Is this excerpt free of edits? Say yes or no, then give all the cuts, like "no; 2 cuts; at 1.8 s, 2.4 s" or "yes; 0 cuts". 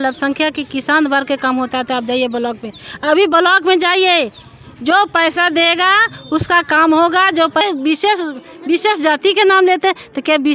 no; 1 cut; at 7.6 s